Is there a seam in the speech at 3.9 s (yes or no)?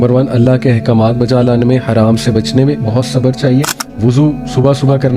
yes